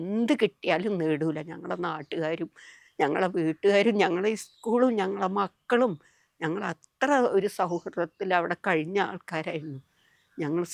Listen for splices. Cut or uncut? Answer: uncut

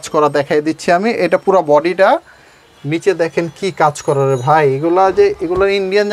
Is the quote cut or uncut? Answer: uncut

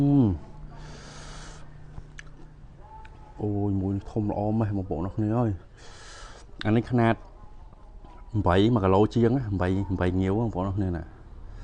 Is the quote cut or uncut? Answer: uncut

